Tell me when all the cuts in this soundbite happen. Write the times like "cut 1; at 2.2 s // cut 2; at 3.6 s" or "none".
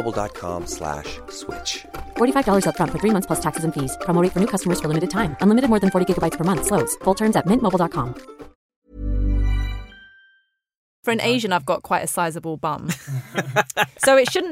cut 1; at 8.6 s // cut 2; at 11.0 s